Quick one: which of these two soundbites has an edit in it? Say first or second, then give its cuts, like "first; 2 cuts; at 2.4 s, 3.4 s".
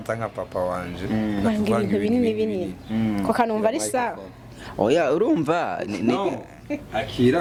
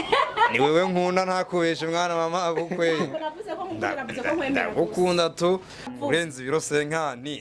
second; 1 cut; at 6.0 s